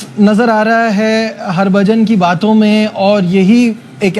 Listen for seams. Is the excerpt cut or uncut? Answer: uncut